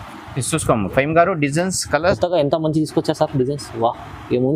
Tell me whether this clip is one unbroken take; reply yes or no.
no